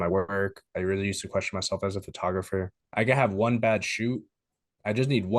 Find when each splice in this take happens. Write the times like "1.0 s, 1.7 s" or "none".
2.8 s